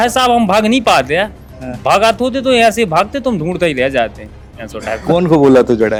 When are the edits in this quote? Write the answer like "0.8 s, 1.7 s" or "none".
none